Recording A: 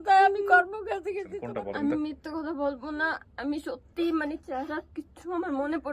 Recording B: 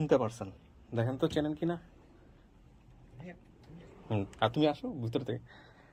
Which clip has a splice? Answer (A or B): A